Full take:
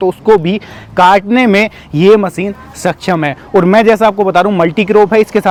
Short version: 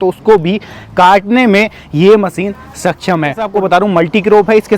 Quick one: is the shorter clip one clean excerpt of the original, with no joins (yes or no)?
no